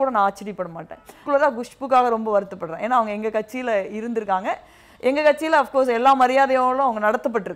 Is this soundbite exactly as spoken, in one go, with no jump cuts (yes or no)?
no